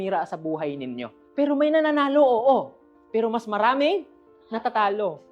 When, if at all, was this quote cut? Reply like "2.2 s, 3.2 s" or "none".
1.2 s